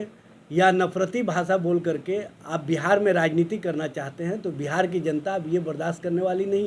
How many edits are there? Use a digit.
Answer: 0